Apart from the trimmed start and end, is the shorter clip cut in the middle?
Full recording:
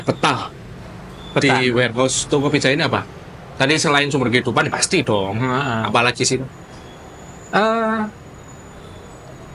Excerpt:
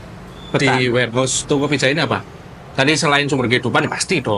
no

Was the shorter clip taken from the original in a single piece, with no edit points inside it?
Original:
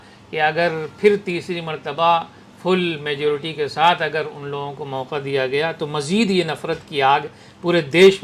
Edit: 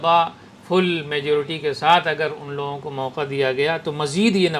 yes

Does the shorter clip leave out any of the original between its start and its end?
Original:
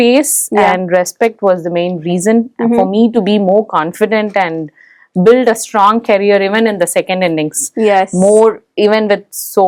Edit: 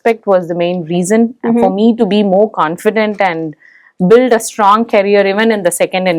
no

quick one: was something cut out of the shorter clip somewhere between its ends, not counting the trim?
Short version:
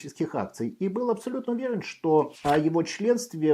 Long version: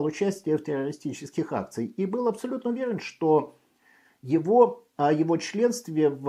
yes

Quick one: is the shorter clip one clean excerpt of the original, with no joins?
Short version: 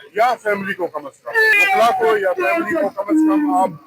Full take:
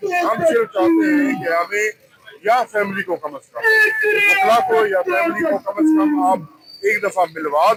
no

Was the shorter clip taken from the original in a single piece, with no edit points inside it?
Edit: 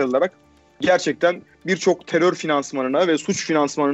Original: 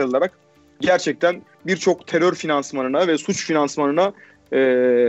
yes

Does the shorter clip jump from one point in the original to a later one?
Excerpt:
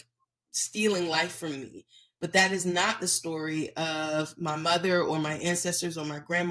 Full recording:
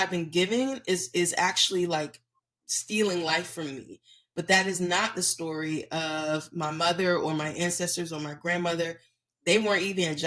no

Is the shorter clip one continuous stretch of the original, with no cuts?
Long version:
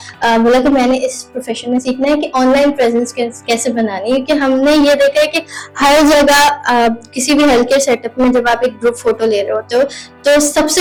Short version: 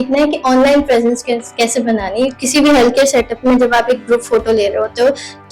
no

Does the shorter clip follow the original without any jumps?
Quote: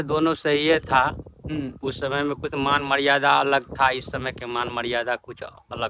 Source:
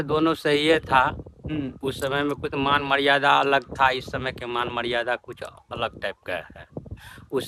yes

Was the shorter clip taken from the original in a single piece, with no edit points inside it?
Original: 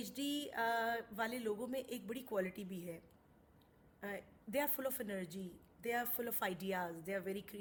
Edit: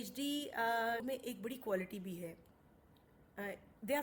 no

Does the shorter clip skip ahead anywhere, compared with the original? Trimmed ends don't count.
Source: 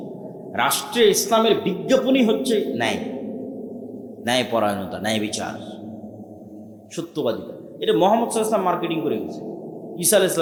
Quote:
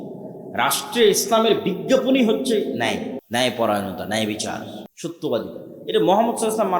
yes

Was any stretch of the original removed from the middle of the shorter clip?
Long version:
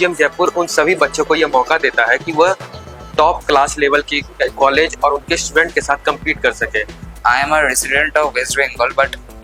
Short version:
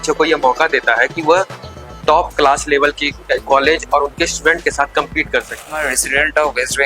yes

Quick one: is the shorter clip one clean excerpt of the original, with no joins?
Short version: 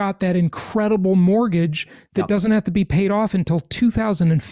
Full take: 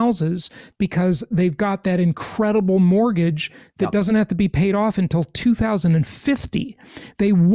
yes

